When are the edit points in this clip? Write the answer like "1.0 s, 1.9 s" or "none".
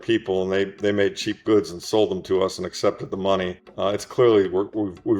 3.6 s

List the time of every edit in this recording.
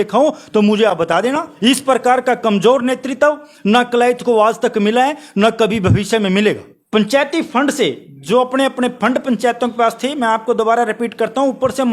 1.5 s, 6.7 s

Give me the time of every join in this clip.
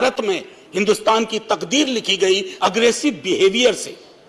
2.5 s

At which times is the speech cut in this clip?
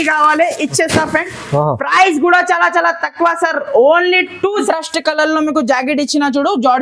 4.6 s

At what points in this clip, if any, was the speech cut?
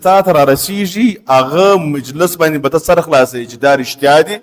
none

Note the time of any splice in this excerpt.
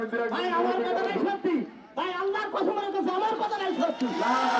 none

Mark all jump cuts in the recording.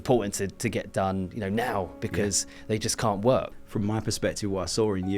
3.6 s

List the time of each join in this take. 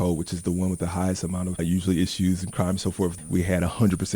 3.1 s

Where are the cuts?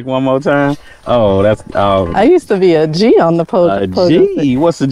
none

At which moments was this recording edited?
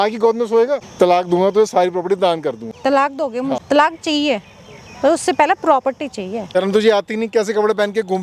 0.9 s, 2.7 s, 3.6 s, 6.5 s

